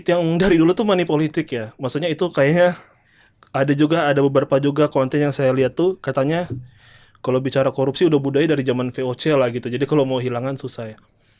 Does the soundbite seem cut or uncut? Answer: uncut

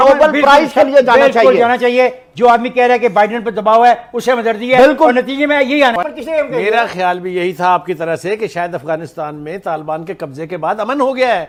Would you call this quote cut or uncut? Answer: uncut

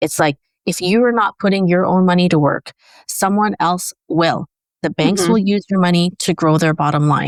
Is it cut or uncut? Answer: uncut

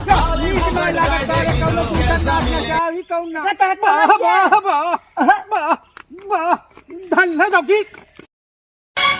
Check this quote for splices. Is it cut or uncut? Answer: cut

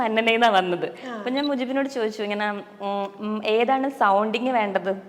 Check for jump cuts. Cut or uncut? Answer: uncut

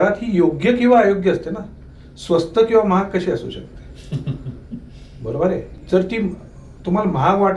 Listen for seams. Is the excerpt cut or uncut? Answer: cut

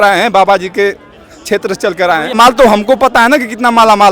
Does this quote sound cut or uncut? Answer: cut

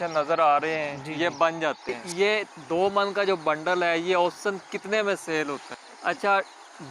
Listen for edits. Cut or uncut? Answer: cut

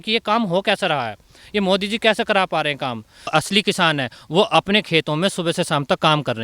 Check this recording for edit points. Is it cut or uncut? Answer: cut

